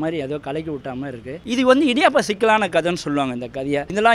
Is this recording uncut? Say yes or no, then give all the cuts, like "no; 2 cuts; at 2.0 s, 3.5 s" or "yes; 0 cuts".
no; 1 cut; at 1.4 s